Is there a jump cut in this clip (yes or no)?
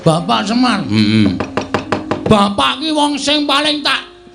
no